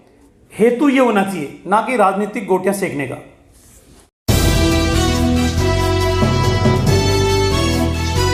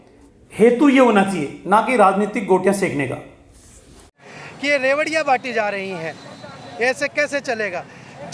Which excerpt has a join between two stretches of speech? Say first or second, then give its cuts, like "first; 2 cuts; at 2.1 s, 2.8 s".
second; 1 cut; at 4.2 s